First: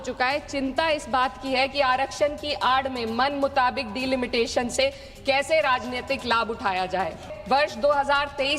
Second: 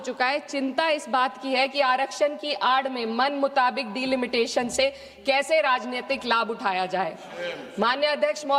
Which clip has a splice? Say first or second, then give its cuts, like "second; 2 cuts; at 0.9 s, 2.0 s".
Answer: first; 1 cut; at 7.3 s